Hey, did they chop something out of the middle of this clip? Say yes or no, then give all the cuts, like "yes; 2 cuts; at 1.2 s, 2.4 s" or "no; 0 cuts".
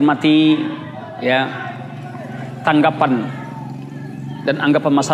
no; 0 cuts